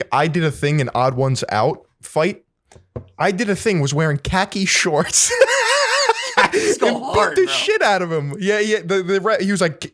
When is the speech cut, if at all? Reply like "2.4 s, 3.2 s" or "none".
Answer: none